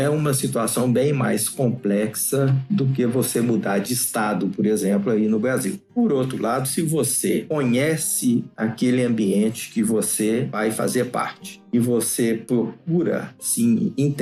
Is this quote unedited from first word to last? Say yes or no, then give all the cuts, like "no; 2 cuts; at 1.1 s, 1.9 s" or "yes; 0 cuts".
yes; 0 cuts